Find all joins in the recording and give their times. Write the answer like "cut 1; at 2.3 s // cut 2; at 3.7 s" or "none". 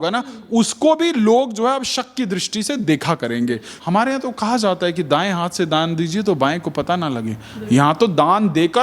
cut 1; at 3.7 s